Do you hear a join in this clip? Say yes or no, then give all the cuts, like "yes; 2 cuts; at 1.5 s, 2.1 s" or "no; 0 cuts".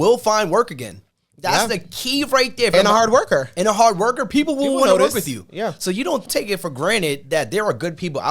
yes; 2 cuts; at 2.7 s, 6.3 s